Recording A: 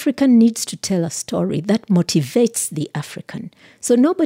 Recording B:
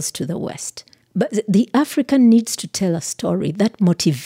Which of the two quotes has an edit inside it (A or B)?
B